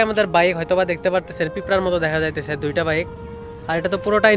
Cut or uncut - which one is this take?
uncut